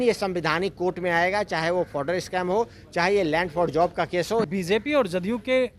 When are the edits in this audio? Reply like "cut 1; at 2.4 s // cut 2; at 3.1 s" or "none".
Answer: cut 1; at 4.5 s